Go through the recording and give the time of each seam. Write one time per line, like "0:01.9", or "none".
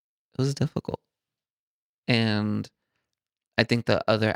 none